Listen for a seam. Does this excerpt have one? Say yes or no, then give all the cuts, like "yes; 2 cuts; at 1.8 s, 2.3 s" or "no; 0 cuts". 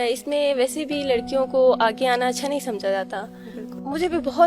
no; 0 cuts